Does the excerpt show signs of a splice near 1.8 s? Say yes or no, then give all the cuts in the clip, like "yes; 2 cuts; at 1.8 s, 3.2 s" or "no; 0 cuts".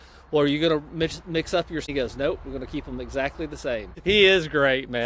yes; 2 cuts; at 1.8 s, 4.0 s